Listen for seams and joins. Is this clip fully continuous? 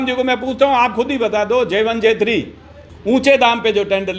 no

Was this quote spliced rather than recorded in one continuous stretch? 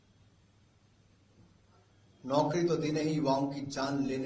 no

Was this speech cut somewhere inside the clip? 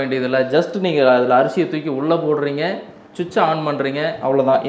no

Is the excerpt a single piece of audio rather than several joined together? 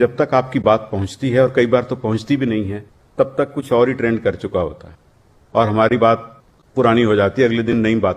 yes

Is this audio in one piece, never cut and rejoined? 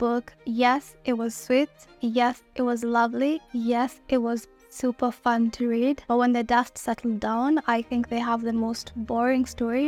yes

